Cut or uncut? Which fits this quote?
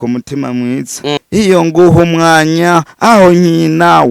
cut